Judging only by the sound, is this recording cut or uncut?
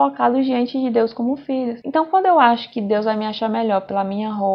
uncut